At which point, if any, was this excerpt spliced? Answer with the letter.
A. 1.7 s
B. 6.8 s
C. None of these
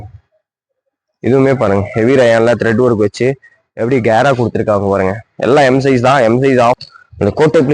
B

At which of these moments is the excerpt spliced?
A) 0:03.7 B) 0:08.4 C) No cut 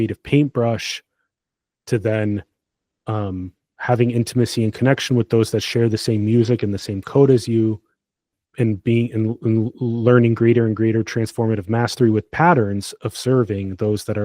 B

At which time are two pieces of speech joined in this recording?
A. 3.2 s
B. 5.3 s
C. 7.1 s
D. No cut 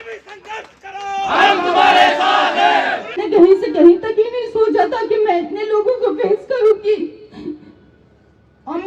A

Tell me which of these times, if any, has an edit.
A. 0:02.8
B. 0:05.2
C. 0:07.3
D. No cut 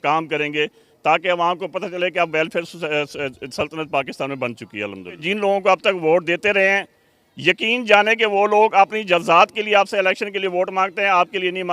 B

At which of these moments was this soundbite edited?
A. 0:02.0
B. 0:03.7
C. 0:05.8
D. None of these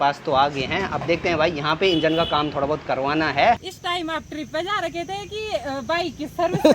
B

